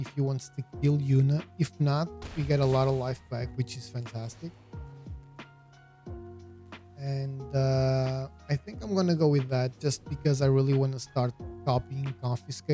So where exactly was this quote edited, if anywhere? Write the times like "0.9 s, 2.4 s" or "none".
5.2 s, 7.0 s